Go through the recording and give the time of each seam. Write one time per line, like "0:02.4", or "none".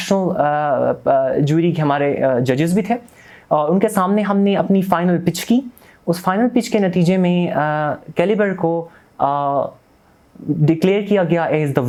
none